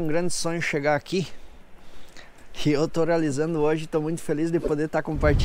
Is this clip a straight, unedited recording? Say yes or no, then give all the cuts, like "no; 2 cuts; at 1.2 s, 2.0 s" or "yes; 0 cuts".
yes; 0 cuts